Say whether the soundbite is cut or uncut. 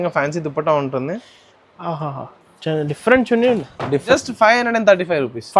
cut